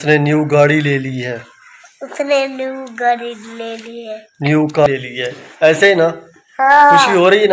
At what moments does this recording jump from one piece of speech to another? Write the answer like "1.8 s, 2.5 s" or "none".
4.9 s